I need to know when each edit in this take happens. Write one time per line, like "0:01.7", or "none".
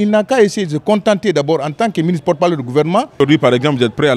0:03.2